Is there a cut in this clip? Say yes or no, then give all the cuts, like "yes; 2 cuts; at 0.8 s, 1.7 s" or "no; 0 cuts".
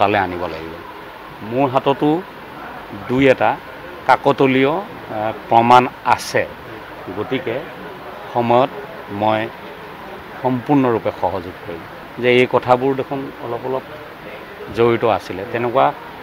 yes; 1 cut; at 12.0 s